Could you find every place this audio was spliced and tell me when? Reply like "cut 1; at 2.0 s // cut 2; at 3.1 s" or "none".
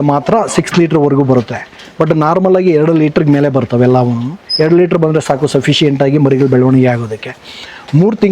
none